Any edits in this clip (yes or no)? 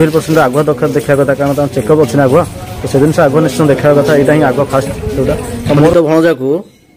yes